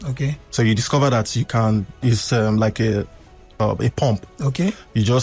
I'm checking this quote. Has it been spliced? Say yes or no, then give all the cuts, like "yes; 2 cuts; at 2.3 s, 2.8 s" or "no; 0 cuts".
yes; 1 cut; at 3.6 s